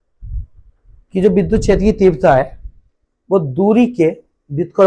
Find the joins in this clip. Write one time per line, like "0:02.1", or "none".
none

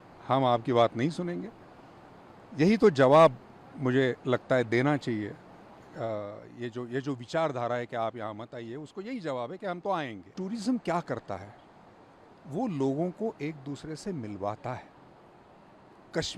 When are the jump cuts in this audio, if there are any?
0:10.3

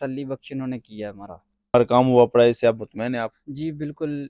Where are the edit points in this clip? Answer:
0:01.7

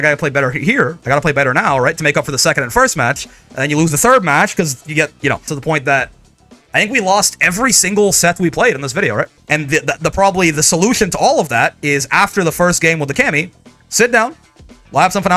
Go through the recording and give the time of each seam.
0:05.5
0:09.3

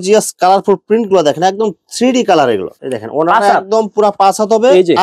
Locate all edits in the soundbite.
0:02.8

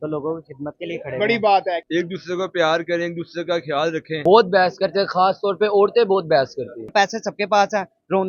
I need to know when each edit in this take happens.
0:01.8
0:04.1
0:06.9

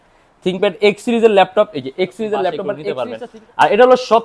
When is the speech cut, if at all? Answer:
0:02.9

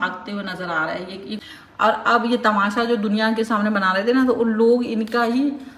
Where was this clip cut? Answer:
0:01.4

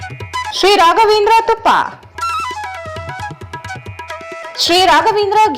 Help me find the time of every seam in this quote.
none

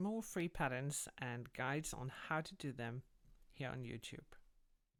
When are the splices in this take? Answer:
none

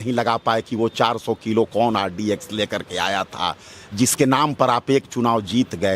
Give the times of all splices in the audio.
none

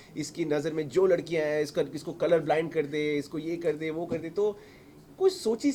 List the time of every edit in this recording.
none

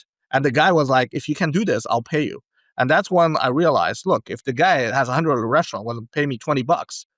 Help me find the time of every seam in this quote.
none

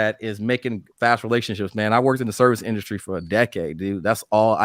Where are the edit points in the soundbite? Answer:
none

